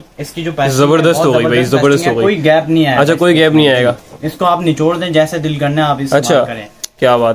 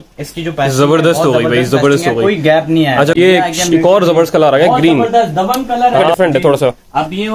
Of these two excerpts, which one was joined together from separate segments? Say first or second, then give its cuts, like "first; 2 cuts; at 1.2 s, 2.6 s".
second; 2 cuts; at 3.2 s, 6.1 s